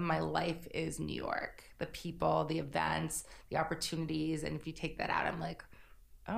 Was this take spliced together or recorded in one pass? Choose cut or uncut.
uncut